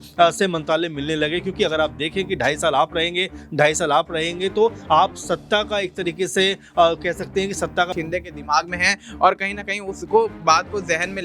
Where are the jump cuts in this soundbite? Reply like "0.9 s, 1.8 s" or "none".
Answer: 7.9 s